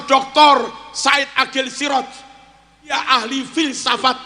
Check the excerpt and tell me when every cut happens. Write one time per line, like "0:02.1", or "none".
0:02.9